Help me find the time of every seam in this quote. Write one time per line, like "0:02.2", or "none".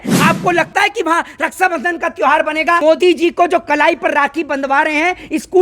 0:02.8